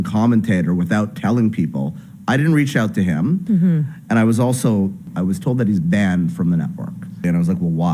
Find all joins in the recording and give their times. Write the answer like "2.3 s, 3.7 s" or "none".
5.1 s, 7.2 s